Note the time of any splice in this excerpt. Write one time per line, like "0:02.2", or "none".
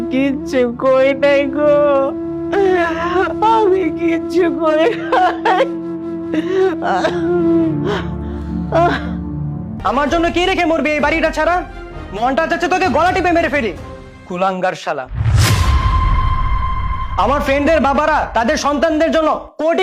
0:09.7

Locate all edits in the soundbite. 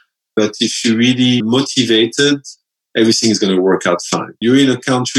0:01.4
0:04.3

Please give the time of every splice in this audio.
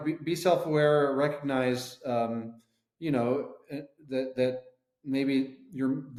none

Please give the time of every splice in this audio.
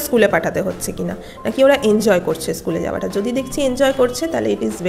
none

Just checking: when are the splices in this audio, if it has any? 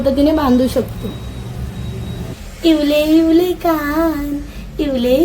0:02.2

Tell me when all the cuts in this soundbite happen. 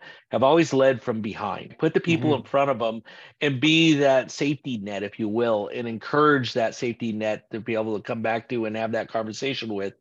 0:01.7

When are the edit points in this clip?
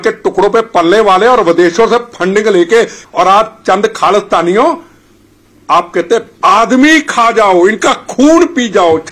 0:03.0

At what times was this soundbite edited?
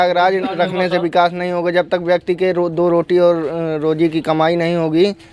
none

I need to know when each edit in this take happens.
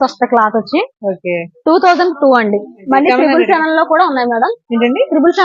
0:02.8

